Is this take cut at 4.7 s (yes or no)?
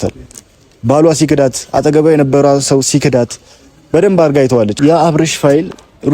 yes